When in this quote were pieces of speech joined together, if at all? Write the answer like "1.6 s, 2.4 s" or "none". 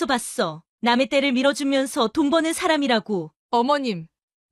3.3 s